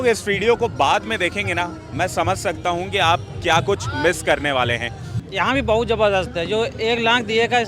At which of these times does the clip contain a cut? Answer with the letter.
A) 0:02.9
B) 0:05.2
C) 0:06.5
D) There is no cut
B